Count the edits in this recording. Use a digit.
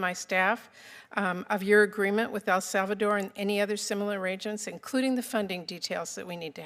0